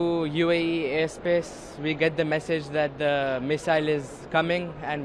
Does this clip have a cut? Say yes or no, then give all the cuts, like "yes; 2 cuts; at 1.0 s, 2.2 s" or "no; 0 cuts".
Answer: no; 0 cuts